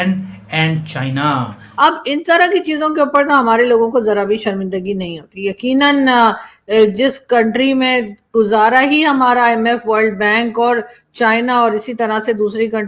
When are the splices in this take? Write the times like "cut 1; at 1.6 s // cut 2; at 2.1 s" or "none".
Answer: cut 1; at 1.6 s

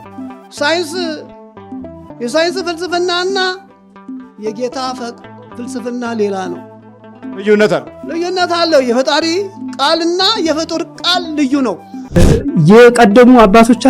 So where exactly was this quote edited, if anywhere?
cut 1; at 12.2 s

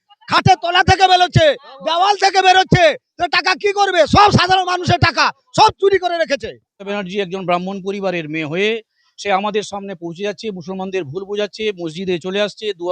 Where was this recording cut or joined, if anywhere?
cut 1; at 6.9 s

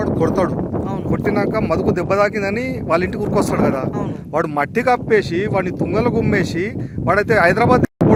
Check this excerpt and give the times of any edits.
none

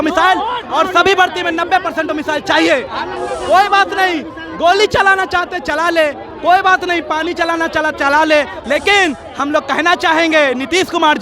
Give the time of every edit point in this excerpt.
cut 1; at 3.2 s

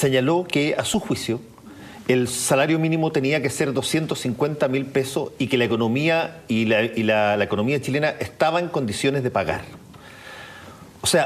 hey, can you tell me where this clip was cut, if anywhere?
cut 1; at 5.9 s

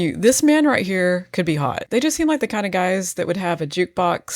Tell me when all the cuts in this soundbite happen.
cut 1; at 1.8 s

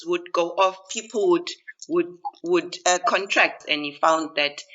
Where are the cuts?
cut 1; at 3.6 s

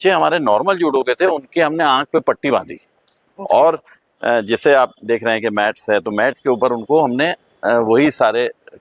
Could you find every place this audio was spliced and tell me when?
none

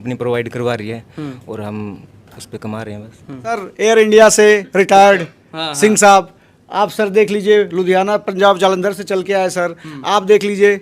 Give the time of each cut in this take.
cut 1; at 3.6 s

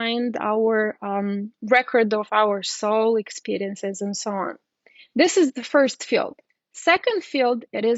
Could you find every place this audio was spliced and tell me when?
cut 1; at 6.4 s

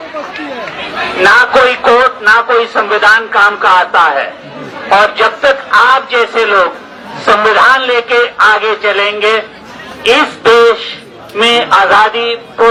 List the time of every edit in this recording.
none

